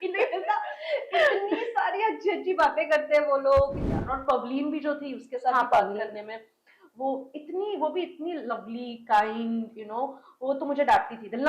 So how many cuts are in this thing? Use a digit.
1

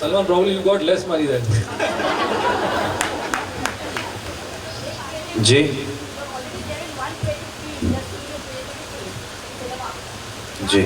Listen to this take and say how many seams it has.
0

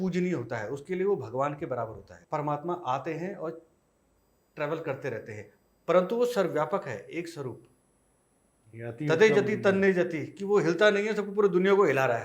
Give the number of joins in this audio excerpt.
1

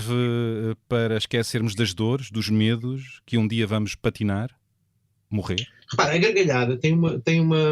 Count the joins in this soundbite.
1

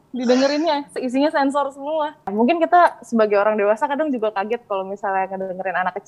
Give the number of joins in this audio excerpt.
1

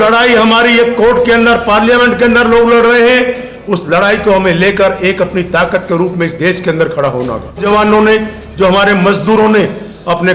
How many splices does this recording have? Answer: 1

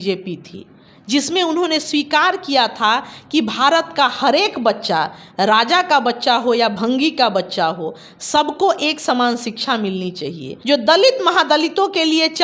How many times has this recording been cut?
1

